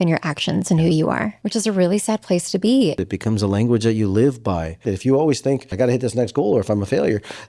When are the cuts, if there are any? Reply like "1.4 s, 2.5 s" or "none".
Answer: 1.4 s, 3.0 s, 4.9 s, 5.7 s